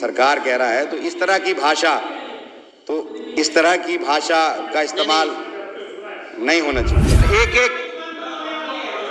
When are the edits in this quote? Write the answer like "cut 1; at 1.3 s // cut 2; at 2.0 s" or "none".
cut 1; at 7.2 s